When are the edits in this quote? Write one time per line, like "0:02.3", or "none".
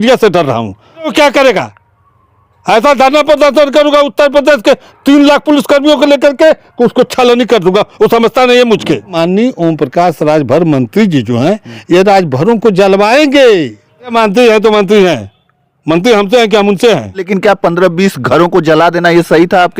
0:01.1
0:09.1
0:14.1
0:17.3